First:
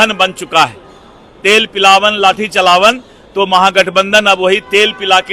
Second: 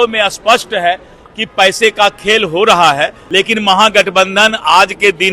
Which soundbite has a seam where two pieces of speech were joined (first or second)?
second